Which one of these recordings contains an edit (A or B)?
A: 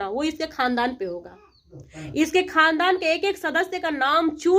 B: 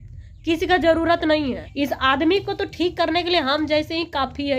B